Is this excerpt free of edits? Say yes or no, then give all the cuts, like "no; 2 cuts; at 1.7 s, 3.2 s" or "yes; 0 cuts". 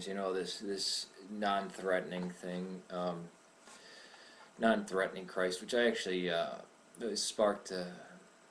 no; 1 cut; at 2.4 s